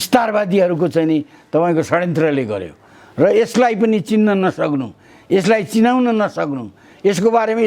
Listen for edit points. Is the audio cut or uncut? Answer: uncut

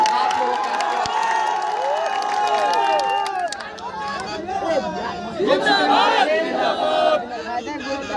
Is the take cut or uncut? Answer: uncut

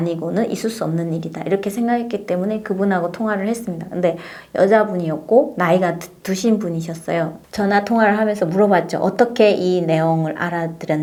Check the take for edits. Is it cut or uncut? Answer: uncut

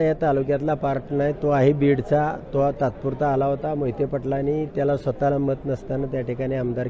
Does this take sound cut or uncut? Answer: uncut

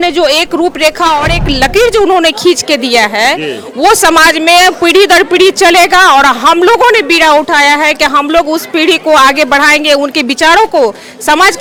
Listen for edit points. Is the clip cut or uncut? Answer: uncut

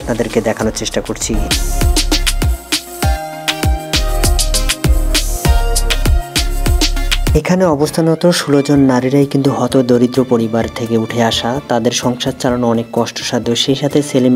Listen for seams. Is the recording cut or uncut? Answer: uncut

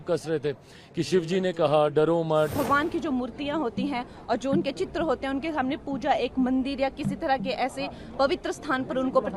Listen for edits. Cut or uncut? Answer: cut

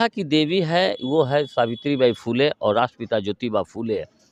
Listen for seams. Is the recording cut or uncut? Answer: uncut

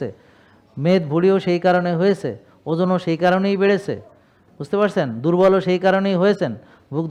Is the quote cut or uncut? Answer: uncut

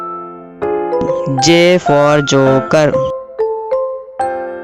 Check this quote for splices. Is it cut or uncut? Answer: cut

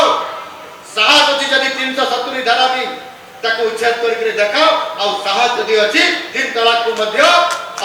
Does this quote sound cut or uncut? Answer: uncut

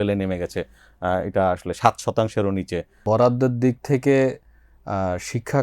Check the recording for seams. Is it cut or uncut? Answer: cut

